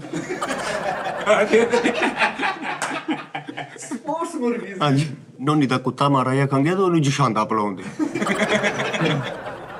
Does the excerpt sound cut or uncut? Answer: uncut